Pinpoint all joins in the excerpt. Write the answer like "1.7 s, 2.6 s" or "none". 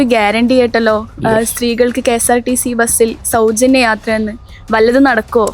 none